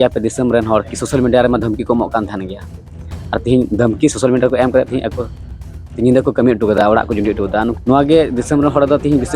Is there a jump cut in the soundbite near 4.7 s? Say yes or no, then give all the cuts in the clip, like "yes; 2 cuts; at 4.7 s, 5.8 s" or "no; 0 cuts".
no; 1 cut; at 7.7 s